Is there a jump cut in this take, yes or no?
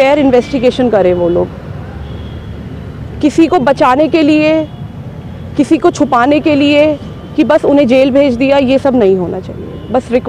no